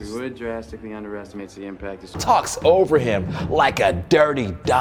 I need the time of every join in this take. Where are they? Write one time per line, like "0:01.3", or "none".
0:02.2